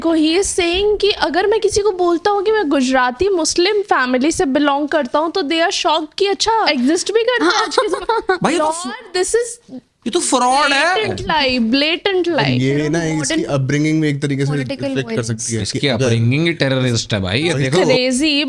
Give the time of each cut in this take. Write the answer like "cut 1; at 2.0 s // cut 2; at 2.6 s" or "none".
cut 1; at 6.7 s // cut 2; at 12.4 s // cut 3; at 17.8 s